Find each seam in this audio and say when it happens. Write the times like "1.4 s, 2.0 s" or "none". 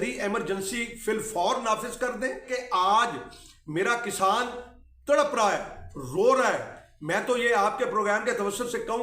2.4 s